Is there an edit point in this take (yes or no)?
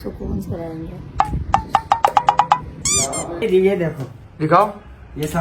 yes